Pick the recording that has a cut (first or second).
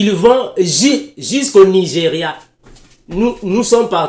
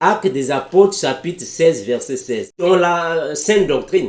second